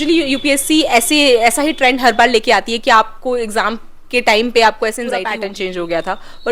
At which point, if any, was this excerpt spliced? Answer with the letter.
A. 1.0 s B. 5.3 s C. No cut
B